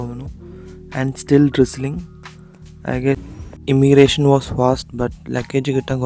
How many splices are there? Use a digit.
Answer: 1